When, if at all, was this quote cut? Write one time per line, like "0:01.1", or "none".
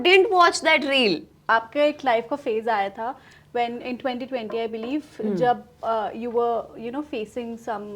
0:01.5